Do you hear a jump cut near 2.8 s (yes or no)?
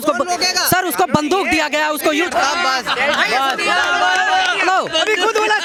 no